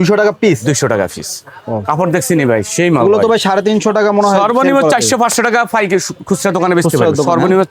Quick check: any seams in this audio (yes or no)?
no